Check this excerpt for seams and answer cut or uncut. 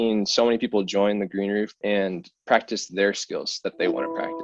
cut